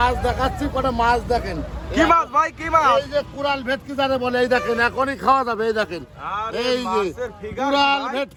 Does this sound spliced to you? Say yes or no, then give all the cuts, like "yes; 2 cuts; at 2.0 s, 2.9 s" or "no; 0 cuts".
no; 0 cuts